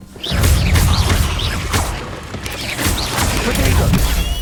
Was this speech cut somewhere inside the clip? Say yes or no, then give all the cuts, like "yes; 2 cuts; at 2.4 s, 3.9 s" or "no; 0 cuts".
no; 0 cuts